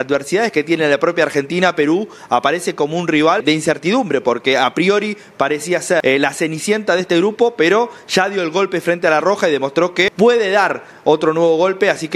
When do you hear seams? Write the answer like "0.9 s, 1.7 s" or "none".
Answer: 3.4 s, 6.0 s, 10.1 s